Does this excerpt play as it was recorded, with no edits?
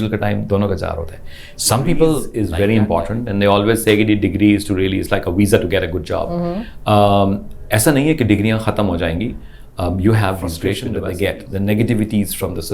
no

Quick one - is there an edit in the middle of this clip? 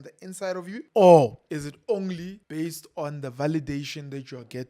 yes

